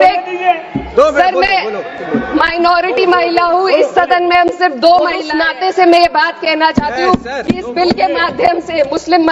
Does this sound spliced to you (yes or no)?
yes